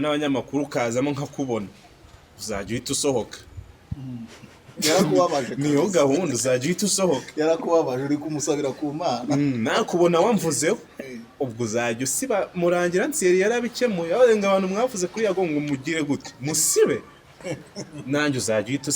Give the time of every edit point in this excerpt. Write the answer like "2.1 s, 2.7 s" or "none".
none